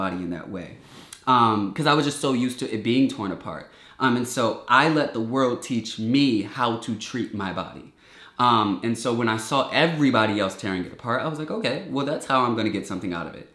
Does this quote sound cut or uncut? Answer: uncut